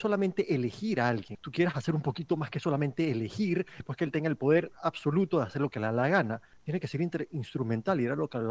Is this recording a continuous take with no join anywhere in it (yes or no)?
no